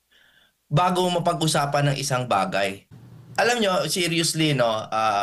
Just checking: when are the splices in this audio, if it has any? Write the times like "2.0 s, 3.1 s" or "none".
2.9 s